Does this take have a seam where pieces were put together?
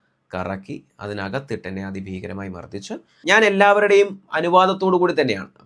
yes; 1 cut; at 3.1 s

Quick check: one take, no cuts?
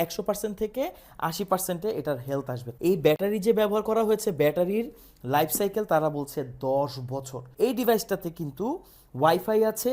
no; 2 cuts; at 2.6 s, 7.4 s

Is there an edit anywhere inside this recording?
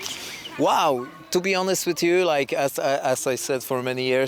no; 0 cuts

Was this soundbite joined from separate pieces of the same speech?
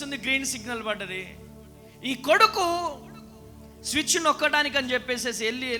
no; 0 cuts

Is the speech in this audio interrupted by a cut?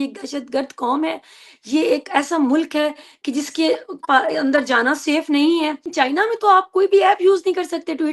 yes; 1 cut; at 5.9 s

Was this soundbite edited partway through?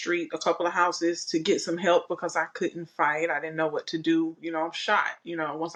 no; 0 cuts

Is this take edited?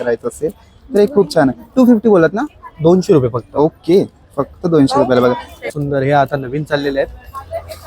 yes; 1 cut; at 5.6 s

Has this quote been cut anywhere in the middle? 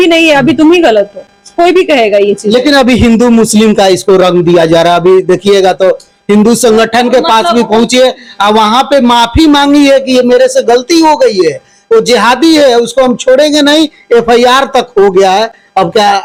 no; 0 cuts

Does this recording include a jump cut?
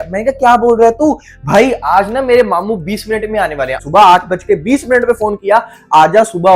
yes; 1 cut; at 3.8 s

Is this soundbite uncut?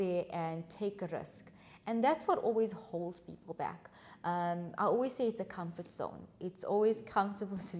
yes; 0 cuts

